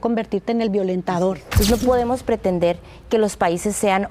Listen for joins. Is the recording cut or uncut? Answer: cut